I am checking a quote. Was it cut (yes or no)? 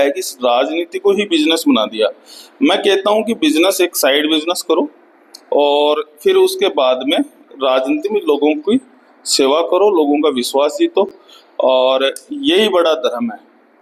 no